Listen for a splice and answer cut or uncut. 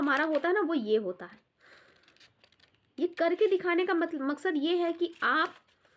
uncut